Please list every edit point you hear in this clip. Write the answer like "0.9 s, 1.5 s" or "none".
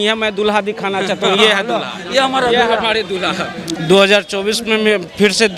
3.7 s